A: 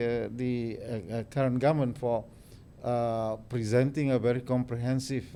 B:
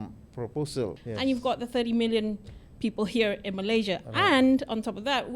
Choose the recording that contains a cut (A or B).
B